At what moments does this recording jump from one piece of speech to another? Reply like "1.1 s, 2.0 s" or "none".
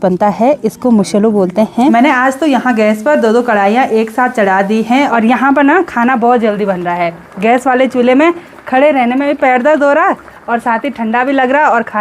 1.9 s, 5.1 s